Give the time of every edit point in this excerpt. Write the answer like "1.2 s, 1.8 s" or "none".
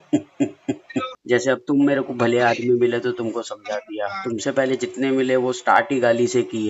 1.1 s